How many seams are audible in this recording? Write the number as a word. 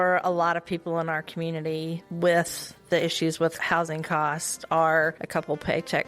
three